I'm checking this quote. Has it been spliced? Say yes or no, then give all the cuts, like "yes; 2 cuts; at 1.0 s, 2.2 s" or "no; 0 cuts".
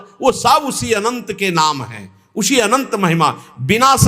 no; 0 cuts